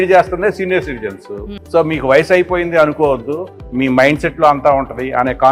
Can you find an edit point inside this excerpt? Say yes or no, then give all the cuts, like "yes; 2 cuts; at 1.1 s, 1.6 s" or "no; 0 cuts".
no; 0 cuts